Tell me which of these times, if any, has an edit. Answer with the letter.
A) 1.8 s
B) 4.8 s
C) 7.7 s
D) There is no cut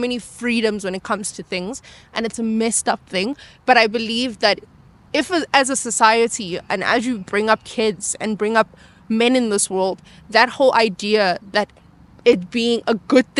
D